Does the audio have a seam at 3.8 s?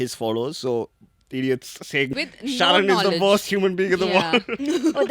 no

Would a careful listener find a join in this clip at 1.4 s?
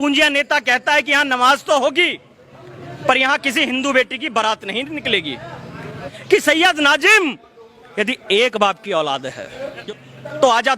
no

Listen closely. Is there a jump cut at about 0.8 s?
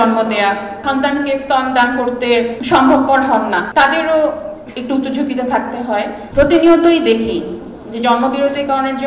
yes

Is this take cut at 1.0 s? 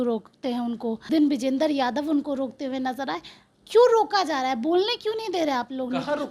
yes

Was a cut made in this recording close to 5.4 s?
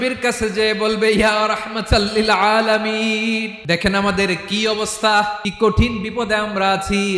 yes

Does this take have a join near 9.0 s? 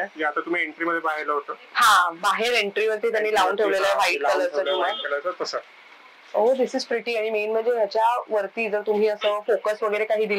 no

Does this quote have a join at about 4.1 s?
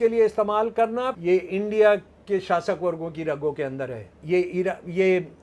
yes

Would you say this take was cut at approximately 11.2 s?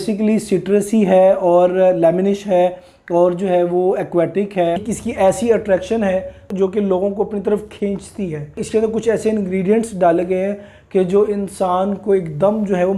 no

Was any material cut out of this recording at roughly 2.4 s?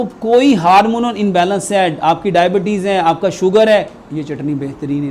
no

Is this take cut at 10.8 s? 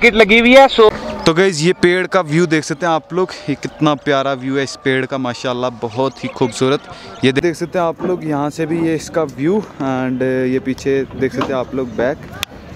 no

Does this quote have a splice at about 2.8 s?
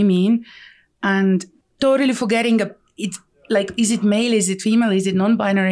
no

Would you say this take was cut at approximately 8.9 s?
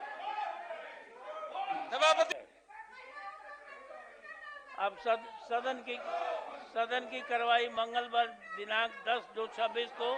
no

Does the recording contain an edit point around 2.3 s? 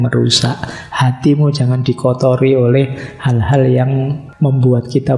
no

